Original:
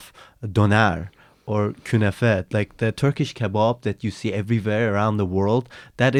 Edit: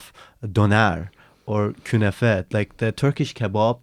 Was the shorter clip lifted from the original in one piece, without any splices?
yes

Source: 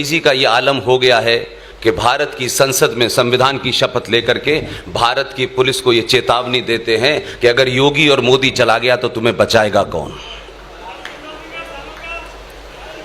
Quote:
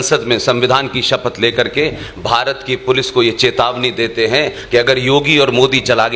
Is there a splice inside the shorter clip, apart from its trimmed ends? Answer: no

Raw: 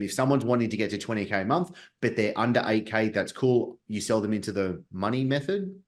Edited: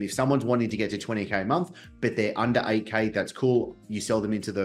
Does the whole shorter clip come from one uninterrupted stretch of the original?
yes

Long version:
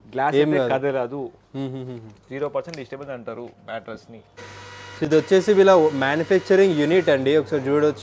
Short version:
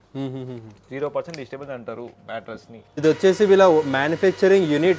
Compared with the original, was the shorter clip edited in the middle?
yes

